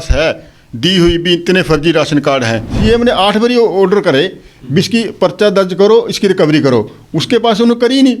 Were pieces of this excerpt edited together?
yes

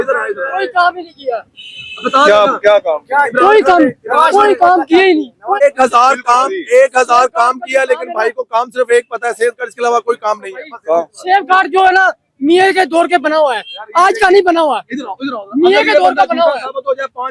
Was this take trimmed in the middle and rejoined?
yes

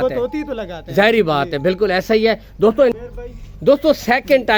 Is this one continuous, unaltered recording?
no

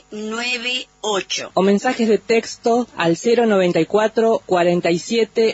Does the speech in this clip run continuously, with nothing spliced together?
no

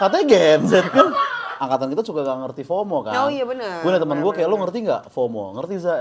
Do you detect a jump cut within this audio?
yes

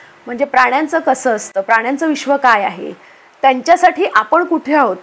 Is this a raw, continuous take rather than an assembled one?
yes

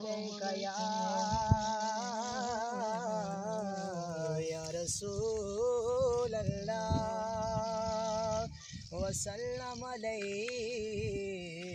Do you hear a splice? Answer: no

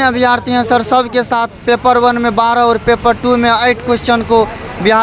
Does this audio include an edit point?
no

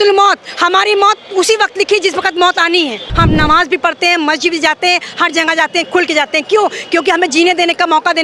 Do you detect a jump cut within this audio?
yes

